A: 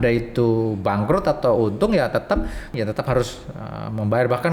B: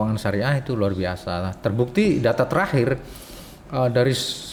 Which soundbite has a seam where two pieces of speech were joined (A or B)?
A